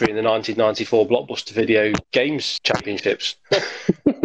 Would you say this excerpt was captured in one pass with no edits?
no; 2 cuts; at 2.3 s, 3.3 s

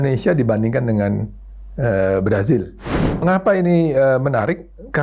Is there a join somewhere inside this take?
yes; 1 cut; at 3.2 s

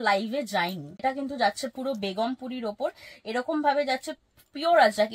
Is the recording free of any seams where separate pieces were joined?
no; 1 cut; at 1.0 s

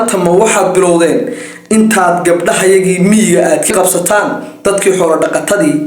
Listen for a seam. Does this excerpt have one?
yes; 1 cut; at 3.7 s

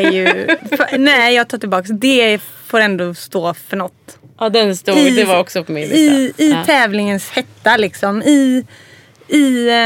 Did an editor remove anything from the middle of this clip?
no; 0 cuts

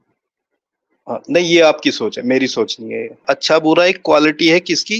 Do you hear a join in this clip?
yes; 1 cut; at 3.2 s

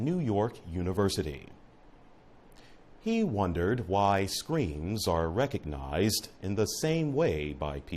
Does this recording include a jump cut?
yes; 1 cut; at 3.8 s

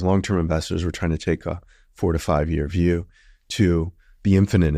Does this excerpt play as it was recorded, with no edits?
yes; 0 cuts

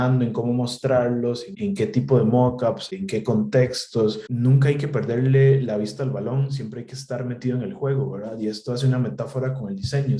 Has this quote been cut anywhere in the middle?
yes; 3 cuts; at 1.5 s, 2.9 s, 4.3 s

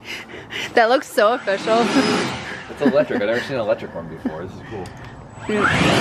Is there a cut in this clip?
yes; 1 cut; at 2.1 s

